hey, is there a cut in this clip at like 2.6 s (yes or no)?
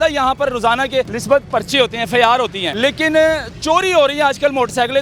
yes